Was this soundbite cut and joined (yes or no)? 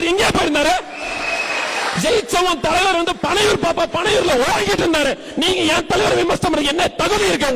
no